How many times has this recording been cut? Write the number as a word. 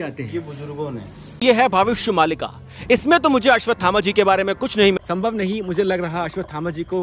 two